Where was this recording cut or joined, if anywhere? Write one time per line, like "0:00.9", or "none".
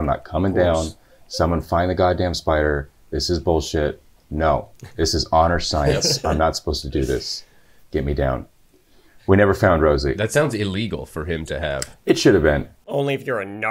0:12.7